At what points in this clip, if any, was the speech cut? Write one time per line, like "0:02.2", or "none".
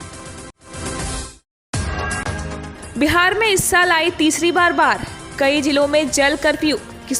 0:01.4